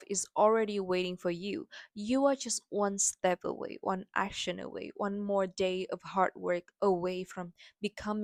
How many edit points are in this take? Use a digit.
0